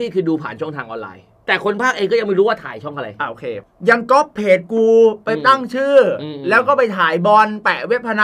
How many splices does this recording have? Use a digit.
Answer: 2